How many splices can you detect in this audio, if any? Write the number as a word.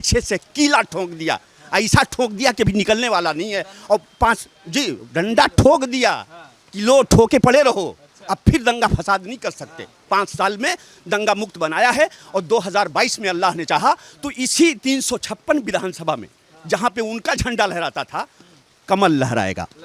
zero